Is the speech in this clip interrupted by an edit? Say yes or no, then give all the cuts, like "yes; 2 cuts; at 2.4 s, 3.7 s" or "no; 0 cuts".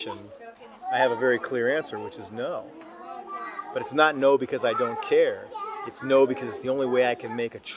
no; 0 cuts